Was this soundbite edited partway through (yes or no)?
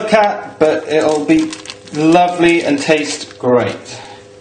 yes